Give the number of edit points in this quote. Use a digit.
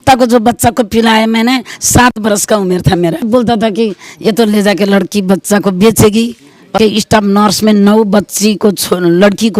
2